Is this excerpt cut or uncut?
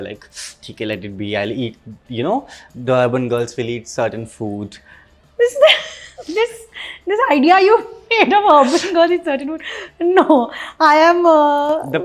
uncut